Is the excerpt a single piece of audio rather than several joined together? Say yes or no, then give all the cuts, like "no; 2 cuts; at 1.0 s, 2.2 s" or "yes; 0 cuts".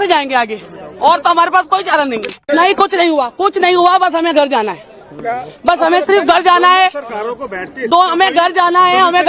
no; 1 cut; at 2.4 s